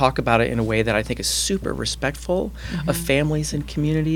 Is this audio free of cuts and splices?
yes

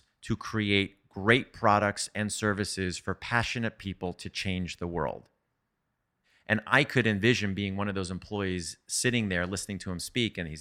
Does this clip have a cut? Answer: yes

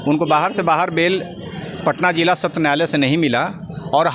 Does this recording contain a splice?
no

